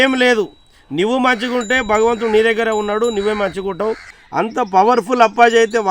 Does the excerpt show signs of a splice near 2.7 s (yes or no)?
no